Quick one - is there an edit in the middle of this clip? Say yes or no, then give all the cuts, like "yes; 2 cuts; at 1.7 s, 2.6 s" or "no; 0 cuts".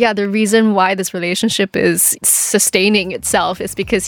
yes; 1 cut; at 2.1 s